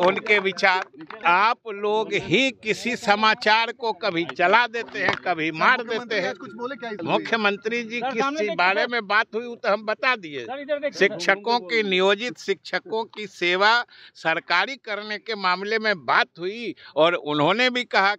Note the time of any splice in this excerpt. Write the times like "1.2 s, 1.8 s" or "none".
1.2 s, 7.0 s